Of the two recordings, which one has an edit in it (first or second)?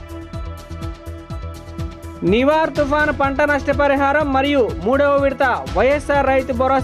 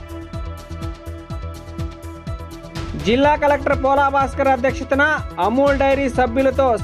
second